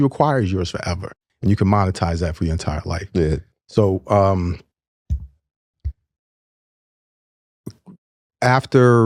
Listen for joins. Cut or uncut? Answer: uncut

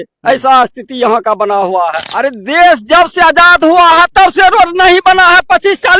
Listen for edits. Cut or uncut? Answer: cut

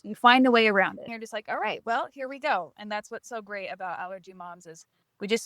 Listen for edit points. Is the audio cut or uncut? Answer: cut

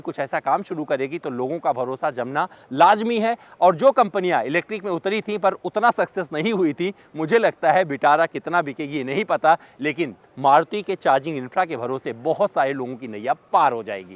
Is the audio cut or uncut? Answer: uncut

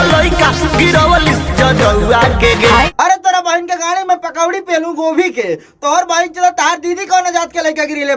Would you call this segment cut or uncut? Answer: cut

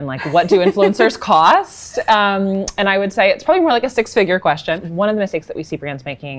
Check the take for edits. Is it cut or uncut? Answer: cut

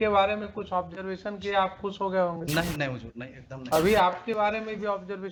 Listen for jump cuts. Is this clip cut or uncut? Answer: uncut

